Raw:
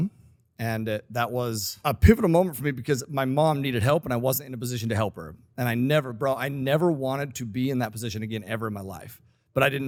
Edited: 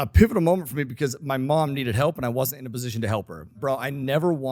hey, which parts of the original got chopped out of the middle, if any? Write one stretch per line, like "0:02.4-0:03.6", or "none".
0:05.4-0:06.1